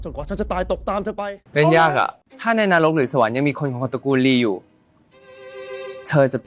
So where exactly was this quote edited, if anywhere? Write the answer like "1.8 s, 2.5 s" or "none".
1.5 s, 2.3 s